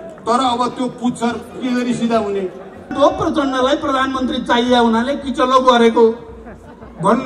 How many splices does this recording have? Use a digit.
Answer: 1